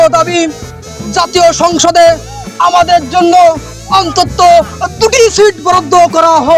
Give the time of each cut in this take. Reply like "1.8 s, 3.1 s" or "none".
none